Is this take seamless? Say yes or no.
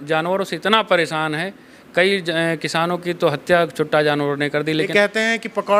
no